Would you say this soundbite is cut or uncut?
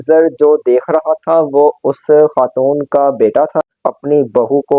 cut